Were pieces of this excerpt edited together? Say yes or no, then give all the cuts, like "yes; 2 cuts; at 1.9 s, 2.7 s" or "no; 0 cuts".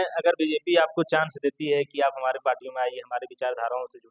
no; 0 cuts